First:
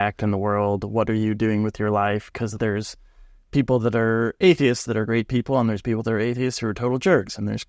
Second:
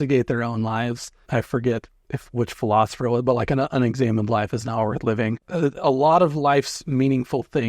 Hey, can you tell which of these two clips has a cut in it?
second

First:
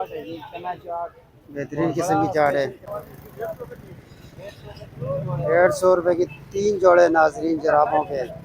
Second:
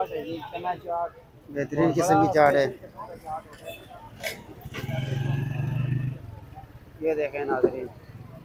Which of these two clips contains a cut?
first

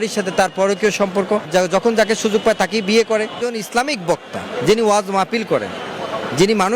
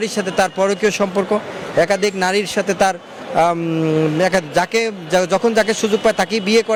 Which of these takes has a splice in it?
first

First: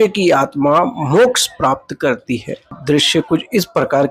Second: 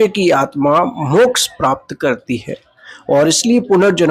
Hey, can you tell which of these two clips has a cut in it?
first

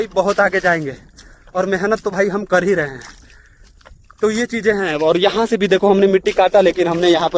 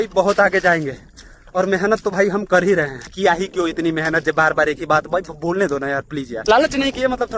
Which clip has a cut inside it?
second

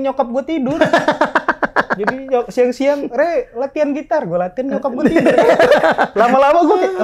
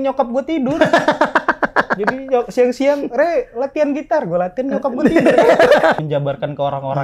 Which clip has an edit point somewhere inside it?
second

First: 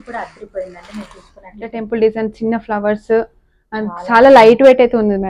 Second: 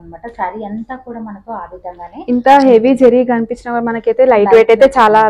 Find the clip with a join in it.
first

